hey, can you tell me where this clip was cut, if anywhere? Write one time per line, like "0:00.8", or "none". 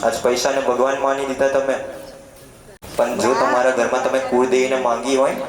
0:02.3